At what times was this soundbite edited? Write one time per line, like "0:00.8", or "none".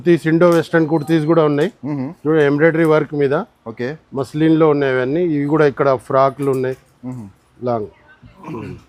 none

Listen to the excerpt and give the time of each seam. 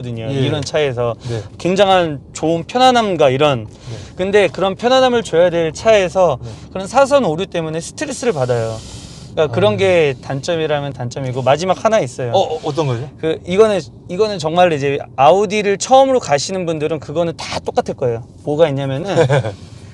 none

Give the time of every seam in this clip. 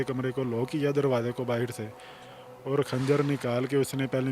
none

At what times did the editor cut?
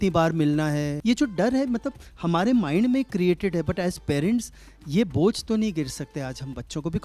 0:00.9

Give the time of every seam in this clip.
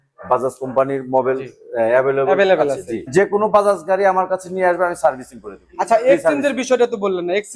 0:03.1

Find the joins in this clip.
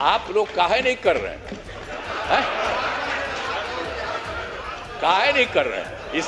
none

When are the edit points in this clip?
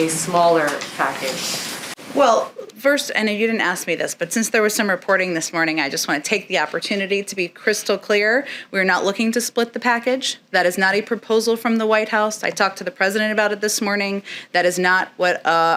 none

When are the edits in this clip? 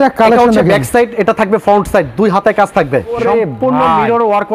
0:03.1

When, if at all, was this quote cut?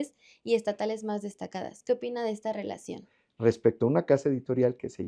0:03.2

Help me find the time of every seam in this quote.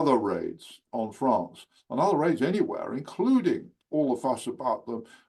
none

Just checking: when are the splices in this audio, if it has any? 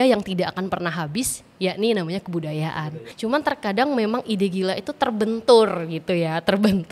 0:02.9

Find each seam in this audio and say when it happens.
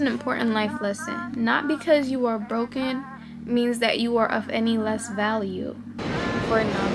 0:06.0

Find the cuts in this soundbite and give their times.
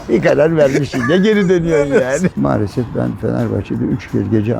0:02.3

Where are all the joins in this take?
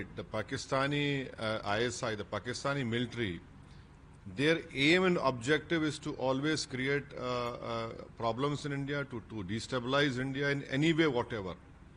none

